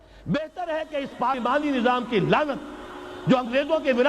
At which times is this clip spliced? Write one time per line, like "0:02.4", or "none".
0:01.4